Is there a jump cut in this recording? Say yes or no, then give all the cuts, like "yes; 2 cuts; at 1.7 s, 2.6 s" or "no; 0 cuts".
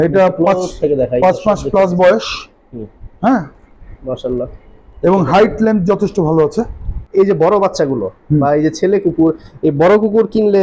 yes; 1 cut; at 6.9 s